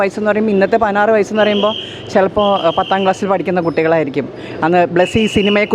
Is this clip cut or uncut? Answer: uncut